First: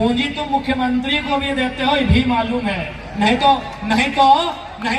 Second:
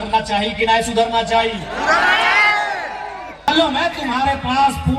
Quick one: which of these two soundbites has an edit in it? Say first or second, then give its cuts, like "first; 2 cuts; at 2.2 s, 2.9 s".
second; 1 cut; at 3.5 s